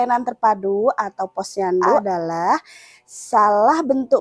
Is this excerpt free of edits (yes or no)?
no